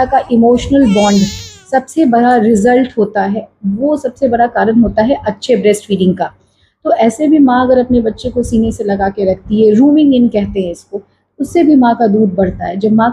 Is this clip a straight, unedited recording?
yes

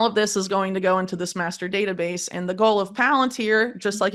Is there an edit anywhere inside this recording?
no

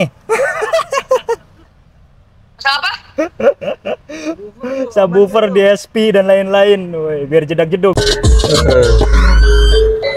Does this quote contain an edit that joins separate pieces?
yes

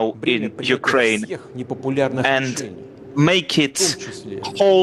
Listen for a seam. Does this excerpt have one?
no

